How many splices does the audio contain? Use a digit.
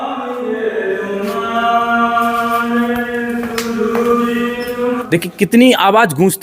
1